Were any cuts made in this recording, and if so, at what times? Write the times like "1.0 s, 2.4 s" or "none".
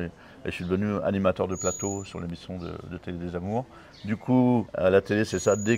none